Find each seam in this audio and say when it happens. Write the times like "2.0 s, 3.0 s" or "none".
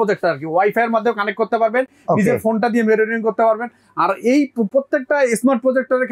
none